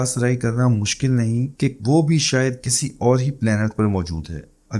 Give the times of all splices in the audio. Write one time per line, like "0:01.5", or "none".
none